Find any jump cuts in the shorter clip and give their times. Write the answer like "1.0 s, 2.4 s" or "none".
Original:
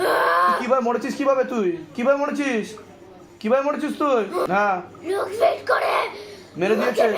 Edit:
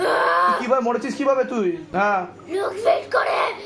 1.9 s